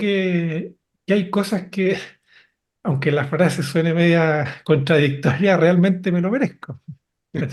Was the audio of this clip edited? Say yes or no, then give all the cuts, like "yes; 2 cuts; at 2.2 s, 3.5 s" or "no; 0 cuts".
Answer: no; 0 cuts